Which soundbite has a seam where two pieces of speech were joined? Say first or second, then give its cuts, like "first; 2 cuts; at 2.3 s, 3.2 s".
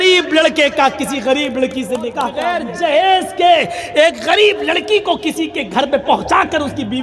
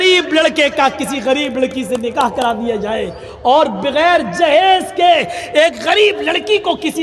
first; 1 cut; at 2.5 s